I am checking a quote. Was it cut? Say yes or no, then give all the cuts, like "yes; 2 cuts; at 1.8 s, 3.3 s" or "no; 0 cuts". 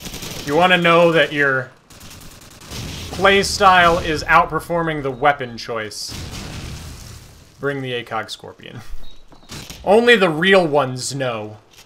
yes; 1 cut; at 9.6 s